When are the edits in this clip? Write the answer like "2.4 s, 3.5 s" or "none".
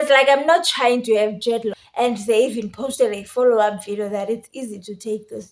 1.8 s